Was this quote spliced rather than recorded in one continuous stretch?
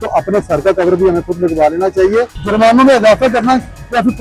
yes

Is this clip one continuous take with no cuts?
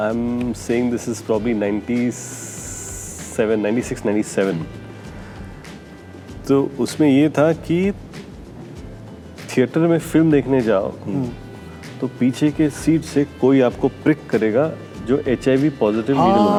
yes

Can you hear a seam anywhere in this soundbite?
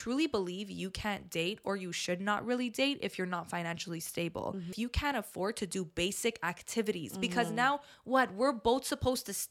yes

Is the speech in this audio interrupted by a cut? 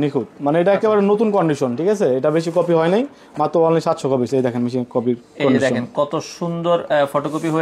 no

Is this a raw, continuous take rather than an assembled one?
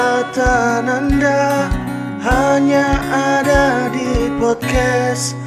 yes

